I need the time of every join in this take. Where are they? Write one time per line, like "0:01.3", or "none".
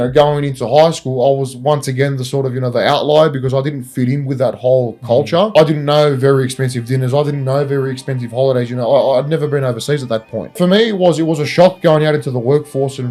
0:05.5
0:10.6

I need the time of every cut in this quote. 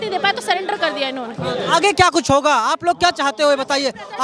none

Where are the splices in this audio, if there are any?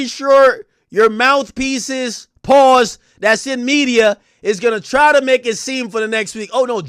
none

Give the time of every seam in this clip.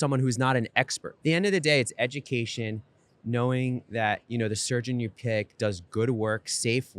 0:01.1

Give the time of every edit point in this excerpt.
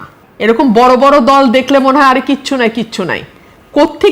none

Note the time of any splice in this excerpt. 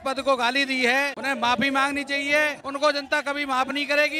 0:01.2
0:02.6

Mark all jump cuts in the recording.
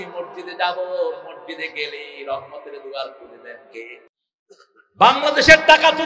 0:04.1

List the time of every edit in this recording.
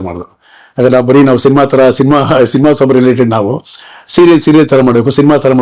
none

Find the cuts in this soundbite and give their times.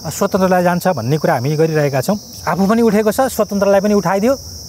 0:02.3

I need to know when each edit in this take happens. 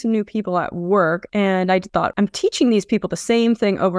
0:01.3
0:02.1

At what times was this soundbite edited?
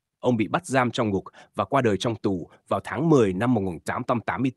none

